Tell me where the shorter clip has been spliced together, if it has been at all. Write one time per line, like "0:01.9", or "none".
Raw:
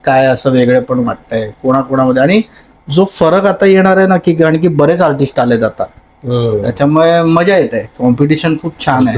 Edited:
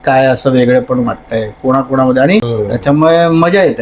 0:02.5